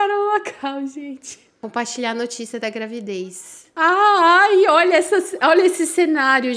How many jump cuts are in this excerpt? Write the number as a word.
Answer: one